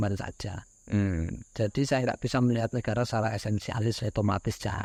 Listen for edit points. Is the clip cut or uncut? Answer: uncut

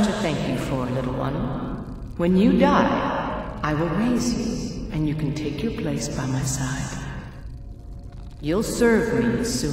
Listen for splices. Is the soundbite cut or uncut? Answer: uncut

